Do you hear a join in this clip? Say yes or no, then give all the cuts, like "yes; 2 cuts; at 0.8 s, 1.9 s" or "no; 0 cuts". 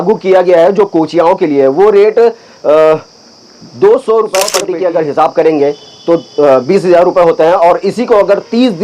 yes; 1 cut; at 4.6 s